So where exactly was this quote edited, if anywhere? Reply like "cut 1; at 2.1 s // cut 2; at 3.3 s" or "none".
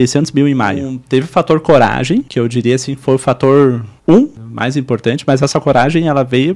cut 1; at 0.9 s // cut 2; at 2.3 s // cut 3; at 3.9 s // cut 4; at 4.5 s